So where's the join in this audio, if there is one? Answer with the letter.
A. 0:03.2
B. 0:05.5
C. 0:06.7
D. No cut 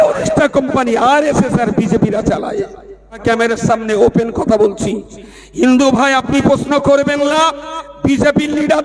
A